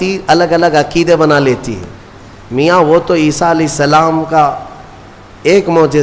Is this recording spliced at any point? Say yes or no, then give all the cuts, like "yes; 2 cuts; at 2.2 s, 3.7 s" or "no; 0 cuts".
no; 0 cuts